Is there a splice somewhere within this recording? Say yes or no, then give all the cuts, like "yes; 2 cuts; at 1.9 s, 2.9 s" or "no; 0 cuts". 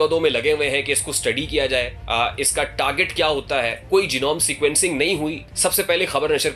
yes; 3 cuts; at 2.0 s, 3.8 s, 5.4 s